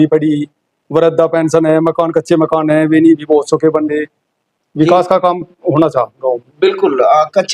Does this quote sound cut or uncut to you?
uncut